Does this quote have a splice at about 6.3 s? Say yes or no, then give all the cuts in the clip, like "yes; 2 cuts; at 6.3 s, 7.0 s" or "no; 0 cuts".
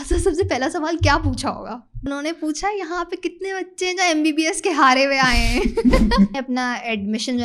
yes; 2 cuts; at 2.0 s, 6.3 s